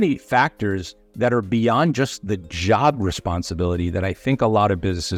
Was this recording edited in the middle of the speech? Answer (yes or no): no